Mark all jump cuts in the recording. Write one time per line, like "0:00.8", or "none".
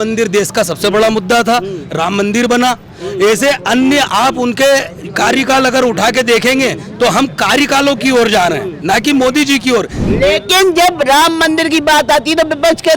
0:10.0